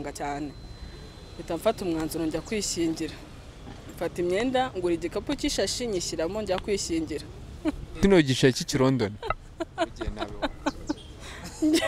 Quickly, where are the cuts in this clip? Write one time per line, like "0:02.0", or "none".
0:07.9

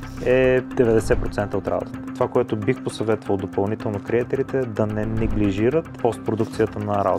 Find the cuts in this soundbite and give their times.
none

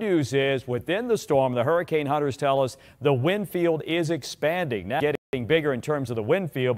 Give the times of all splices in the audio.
0:05.2

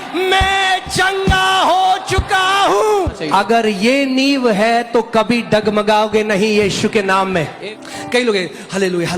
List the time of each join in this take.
0:03.2
0:07.6

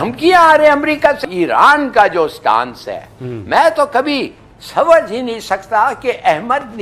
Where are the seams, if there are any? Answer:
0:01.2

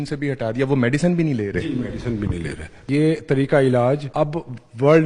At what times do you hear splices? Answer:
0:02.9
0:04.1

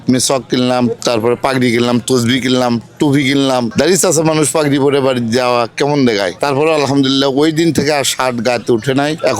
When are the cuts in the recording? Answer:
none

